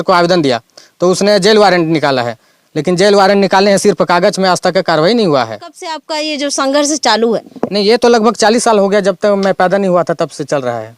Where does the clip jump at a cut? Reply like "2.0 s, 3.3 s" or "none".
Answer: 6.0 s